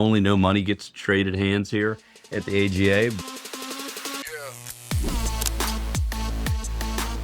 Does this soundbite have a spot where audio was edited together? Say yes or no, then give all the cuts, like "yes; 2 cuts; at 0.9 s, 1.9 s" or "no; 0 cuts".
yes; 1 cut; at 3.2 s